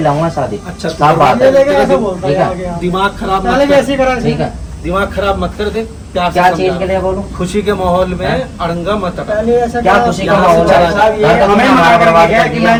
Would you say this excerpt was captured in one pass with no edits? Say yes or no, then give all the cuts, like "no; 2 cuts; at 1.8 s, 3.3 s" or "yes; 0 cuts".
yes; 0 cuts